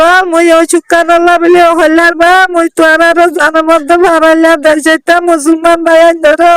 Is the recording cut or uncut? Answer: uncut